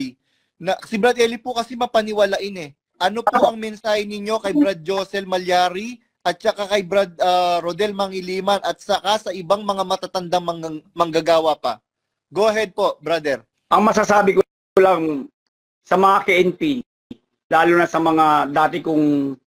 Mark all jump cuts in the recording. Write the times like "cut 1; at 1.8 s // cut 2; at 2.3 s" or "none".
cut 1; at 2.9 s // cut 2; at 13.5 s